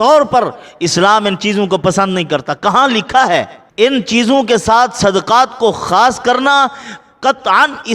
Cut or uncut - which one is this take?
cut